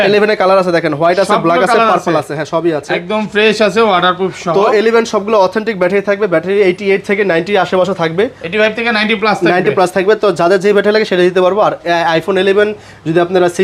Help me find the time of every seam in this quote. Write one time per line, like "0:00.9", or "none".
none